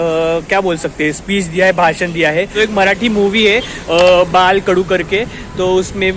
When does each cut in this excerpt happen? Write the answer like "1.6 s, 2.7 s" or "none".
2.5 s